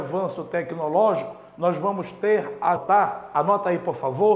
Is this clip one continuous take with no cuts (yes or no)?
no